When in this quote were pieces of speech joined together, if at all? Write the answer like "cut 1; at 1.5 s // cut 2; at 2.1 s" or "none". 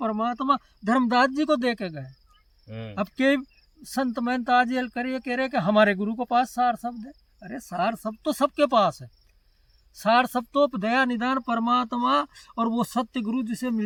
none